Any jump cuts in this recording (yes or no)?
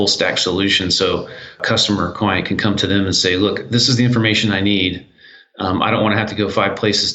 yes